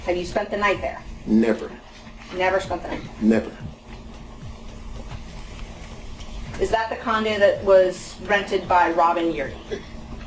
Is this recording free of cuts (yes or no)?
yes